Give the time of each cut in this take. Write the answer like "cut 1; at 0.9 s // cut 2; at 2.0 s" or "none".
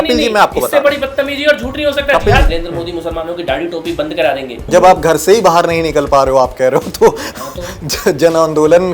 cut 1; at 2.5 s // cut 2; at 4.6 s